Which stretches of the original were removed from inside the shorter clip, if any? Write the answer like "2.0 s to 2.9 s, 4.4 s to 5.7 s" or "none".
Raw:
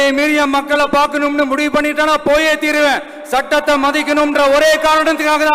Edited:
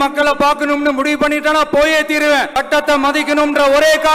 3.0 s to 3.3 s